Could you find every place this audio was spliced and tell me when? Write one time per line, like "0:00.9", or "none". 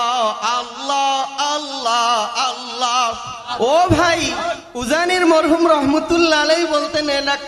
0:03.5
0:04.7